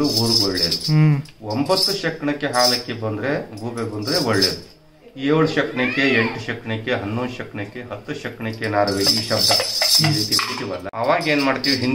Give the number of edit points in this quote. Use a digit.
1